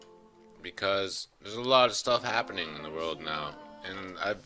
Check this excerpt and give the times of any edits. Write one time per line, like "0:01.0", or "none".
none